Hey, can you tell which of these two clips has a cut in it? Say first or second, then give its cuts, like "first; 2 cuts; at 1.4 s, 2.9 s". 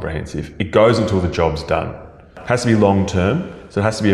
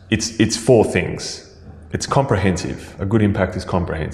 first; 1 cut; at 2.3 s